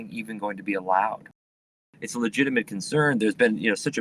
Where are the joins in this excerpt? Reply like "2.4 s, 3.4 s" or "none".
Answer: 1.5 s